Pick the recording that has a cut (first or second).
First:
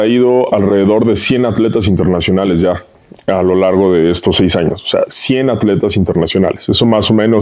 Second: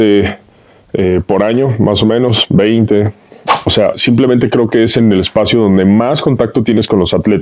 second